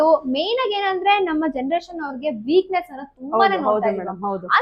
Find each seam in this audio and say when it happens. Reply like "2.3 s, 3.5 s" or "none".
none

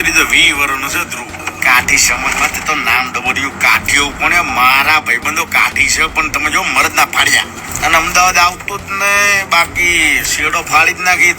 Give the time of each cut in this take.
1.5 s, 7.6 s

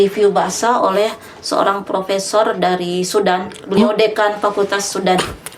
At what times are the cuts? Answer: none

